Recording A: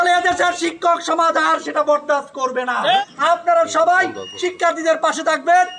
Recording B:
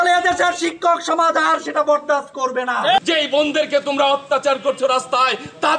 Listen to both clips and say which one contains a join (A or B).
B